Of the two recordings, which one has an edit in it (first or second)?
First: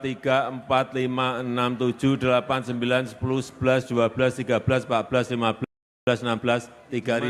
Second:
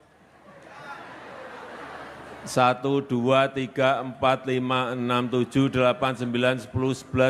second